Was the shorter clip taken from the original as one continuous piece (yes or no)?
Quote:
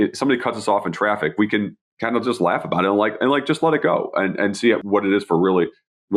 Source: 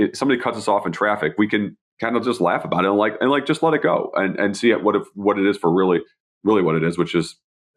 no